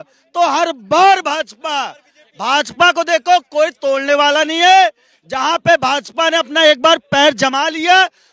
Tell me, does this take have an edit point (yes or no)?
no